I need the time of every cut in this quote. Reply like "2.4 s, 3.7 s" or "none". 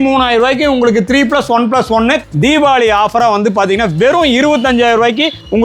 2.2 s